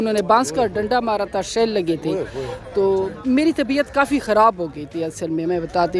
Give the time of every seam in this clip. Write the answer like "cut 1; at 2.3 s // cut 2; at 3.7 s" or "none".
none